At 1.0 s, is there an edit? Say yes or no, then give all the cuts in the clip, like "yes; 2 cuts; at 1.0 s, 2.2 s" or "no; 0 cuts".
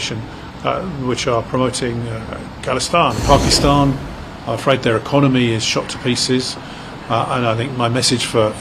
no; 1 cut; at 3.2 s